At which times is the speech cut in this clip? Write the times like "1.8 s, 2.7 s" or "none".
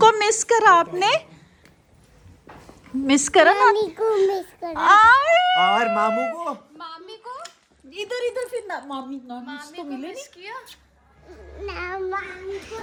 none